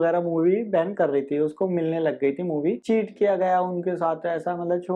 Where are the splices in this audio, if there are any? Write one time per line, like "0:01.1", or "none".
0:02.8